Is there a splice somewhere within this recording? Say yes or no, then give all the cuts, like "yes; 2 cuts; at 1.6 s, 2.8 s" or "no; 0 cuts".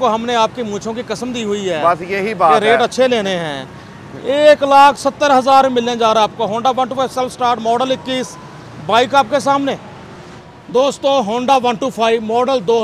no; 0 cuts